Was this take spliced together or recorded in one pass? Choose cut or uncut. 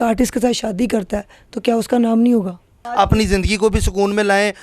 cut